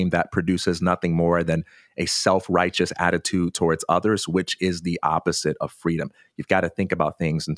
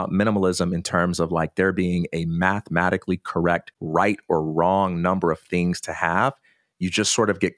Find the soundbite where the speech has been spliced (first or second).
second